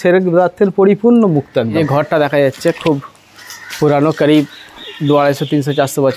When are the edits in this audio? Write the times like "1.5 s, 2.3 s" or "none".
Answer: 1.7 s